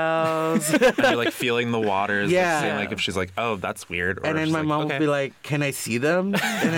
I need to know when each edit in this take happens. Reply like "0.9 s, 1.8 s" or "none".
none

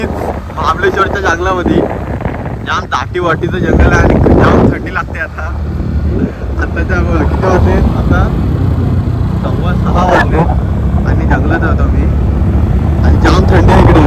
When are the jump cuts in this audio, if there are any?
none

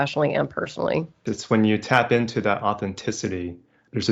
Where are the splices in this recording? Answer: 1.3 s

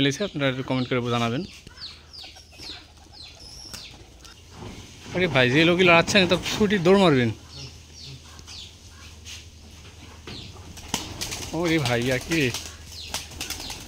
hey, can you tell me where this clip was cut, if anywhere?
4.3 s

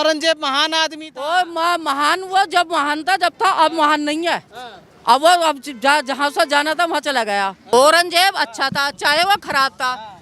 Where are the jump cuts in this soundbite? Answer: 7.6 s

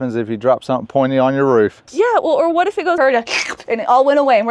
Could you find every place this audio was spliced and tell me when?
1.9 s, 3.0 s

